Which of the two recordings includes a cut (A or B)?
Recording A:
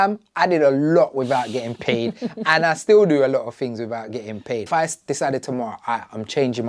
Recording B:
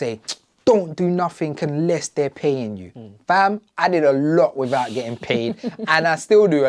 A